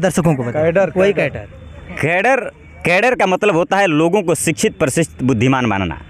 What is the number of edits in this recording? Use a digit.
0